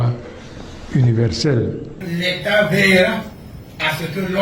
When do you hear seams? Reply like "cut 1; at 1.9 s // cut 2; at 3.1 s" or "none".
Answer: cut 1; at 2.0 s